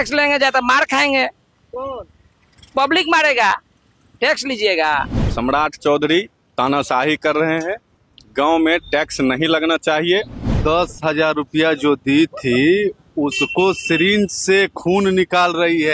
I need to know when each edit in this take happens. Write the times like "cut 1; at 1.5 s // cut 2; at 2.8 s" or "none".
cut 1; at 5.2 s // cut 2; at 10.5 s